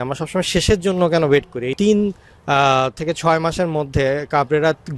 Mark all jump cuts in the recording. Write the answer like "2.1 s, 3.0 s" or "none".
1.8 s